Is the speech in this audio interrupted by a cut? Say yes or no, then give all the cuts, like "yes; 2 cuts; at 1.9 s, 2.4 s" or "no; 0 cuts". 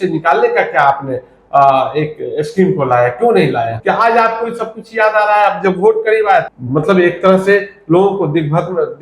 yes; 2 cuts; at 3.8 s, 6.5 s